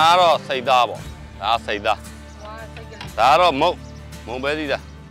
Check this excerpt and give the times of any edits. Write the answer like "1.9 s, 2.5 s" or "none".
none

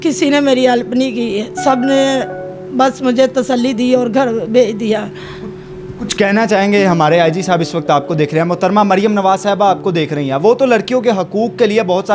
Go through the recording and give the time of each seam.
none

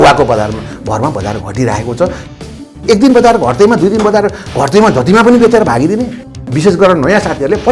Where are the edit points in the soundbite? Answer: 2.5 s, 6.3 s

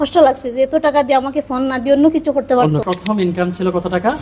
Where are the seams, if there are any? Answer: 2.9 s

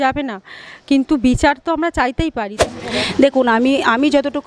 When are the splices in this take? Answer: 2.5 s

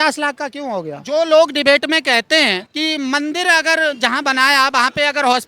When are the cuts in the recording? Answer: 1.0 s, 2.7 s

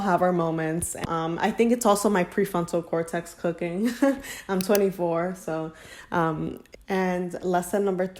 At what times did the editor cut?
1.0 s, 6.6 s

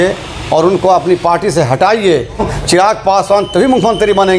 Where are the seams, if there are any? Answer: 2.5 s

